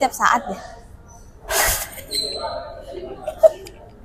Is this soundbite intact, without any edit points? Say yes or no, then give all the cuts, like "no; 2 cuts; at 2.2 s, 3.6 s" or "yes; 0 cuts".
yes; 0 cuts